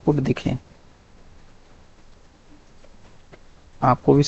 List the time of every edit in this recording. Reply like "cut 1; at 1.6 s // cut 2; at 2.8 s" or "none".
none